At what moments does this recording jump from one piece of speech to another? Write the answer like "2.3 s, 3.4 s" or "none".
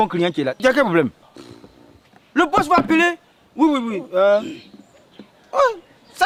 none